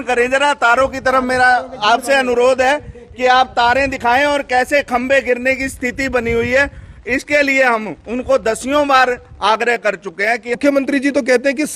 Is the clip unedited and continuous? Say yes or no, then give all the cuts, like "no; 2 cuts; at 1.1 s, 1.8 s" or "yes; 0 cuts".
no; 1 cut; at 10.6 s